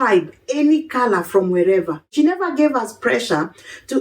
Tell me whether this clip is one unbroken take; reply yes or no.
no